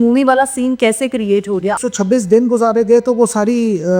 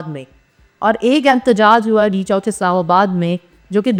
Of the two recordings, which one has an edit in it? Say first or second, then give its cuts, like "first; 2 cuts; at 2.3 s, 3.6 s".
first; 1 cut; at 1.8 s